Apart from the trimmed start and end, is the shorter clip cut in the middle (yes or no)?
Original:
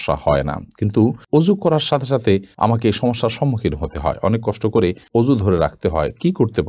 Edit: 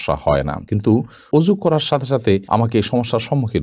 yes